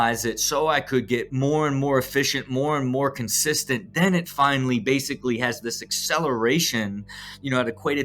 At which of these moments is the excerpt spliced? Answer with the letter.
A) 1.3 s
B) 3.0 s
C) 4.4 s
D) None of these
A